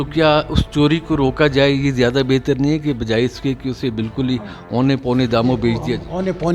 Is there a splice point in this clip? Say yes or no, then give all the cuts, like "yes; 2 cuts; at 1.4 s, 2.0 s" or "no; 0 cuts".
no; 0 cuts